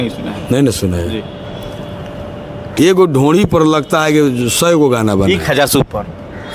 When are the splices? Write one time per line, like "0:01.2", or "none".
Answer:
0:02.5